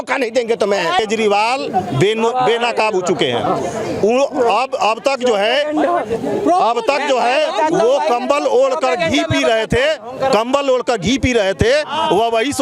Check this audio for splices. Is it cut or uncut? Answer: cut